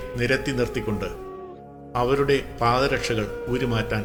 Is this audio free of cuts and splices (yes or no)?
yes